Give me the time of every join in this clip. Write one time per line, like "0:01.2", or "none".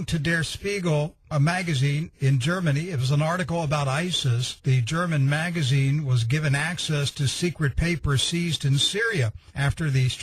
none